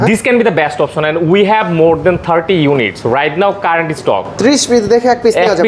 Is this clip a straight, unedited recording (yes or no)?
yes